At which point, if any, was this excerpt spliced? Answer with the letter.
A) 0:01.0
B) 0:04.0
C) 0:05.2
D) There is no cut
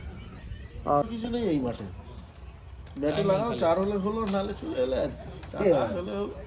A